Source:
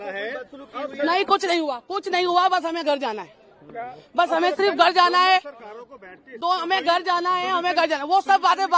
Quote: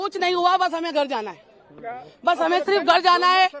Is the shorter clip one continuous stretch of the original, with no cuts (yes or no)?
yes